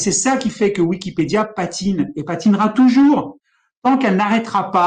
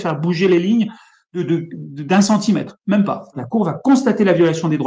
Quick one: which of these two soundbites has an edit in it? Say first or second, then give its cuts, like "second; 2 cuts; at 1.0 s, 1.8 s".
second; 1 cut; at 3.4 s